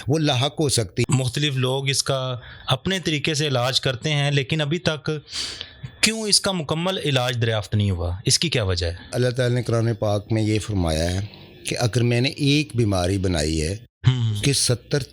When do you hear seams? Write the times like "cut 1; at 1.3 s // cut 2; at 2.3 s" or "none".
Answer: cut 1; at 1.1 s // cut 2; at 9.1 s